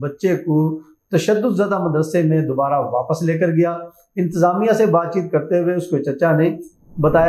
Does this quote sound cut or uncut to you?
uncut